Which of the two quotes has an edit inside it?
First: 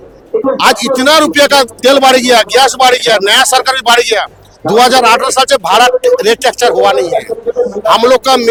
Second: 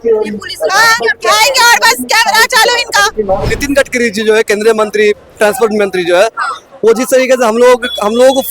second; 1 cut; at 3.5 s

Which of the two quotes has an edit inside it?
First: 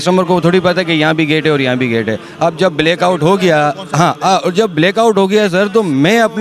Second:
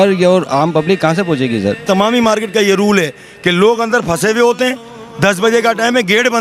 second; 1 cut; at 1.8 s

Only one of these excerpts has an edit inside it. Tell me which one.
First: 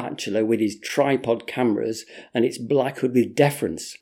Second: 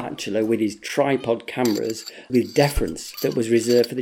second; 1 cut; at 2.3 s

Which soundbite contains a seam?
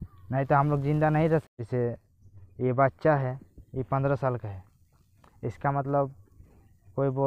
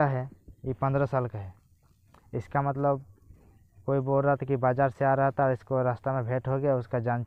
first; 1 cut; at 1.4 s

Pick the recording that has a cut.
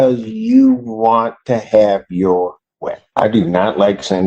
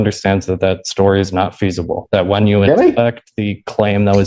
first; 1 cut; at 3.0 s

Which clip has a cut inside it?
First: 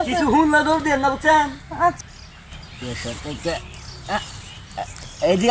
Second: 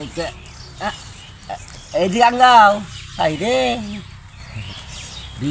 first; 1 cut; at 2.0 s

